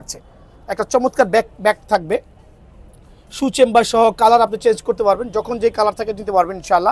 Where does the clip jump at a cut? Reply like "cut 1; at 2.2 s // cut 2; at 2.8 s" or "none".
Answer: none

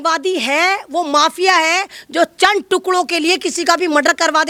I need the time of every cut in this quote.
none

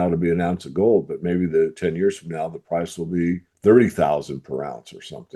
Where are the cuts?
cut 1; at 3.5 s

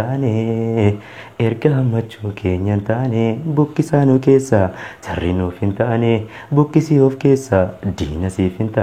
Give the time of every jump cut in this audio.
none

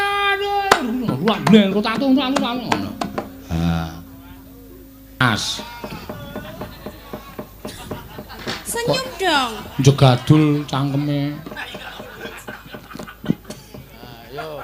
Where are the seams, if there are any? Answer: cut 1; at 5.2 s

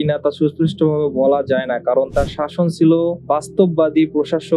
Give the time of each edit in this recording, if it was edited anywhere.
cut 1; at 2.1 s

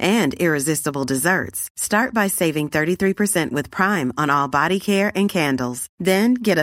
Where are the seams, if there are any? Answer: none

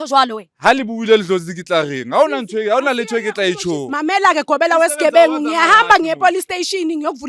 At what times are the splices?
cut 1; at 3.9 s

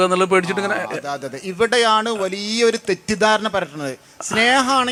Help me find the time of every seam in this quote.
none

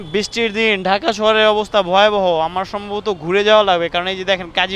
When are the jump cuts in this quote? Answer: none

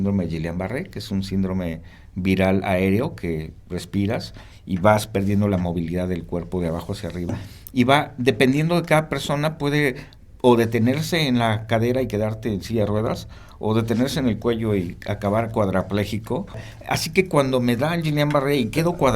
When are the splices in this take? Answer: cut 1; at 7.3 s // cut 2; at 16.7 s

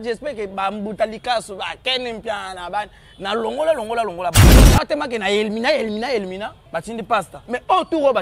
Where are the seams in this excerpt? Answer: cut 1; at 4.4 s // cut 2; at 6.9 s

